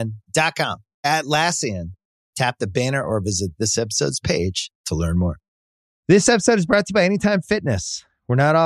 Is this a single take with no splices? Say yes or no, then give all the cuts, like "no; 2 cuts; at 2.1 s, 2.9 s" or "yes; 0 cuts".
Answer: no; 1 cut; at 5.9 s